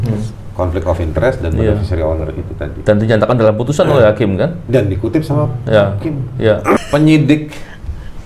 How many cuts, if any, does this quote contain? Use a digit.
1